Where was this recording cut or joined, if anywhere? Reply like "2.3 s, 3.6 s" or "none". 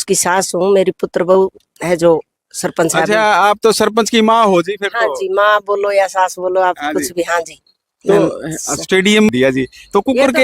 9.3 s